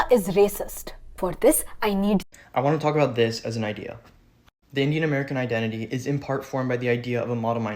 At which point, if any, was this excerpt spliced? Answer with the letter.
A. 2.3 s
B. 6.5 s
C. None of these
A